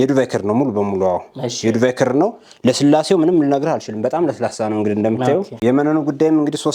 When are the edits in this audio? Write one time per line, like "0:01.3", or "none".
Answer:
none